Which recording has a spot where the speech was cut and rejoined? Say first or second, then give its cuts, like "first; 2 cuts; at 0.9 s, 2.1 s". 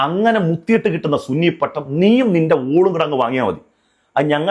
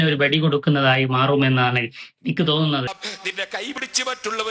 second; 1 cut; at 3.1 s